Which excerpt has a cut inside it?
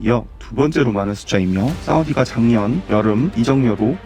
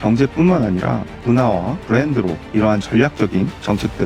first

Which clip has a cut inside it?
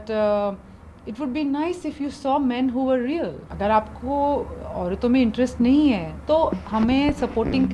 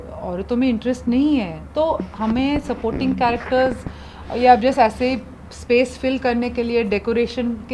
first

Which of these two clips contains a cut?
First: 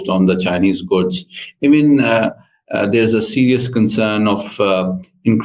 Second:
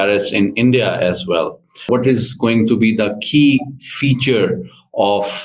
second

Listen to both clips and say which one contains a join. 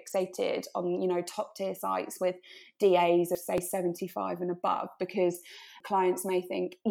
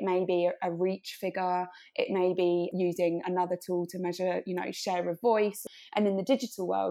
second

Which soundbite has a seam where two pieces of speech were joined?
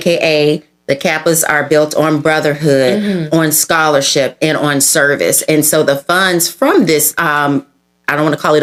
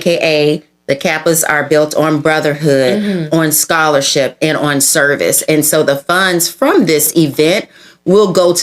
second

